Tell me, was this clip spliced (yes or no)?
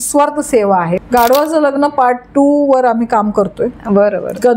yes